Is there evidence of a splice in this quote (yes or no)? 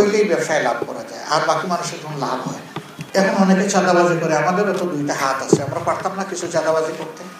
yes